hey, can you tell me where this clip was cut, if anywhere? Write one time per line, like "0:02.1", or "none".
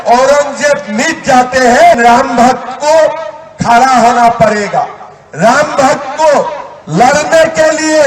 0:02.0